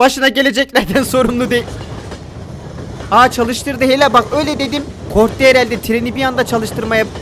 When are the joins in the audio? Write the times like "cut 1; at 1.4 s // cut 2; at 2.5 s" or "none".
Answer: none